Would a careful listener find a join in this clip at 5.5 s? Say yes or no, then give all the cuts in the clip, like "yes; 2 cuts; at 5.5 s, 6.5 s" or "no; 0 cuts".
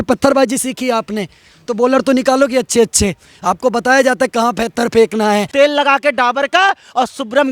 yes; 1 cut; at 5.5 s